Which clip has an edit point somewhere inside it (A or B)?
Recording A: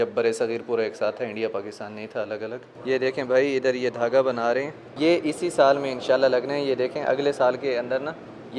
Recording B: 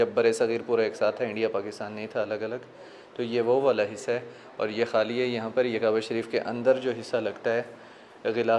A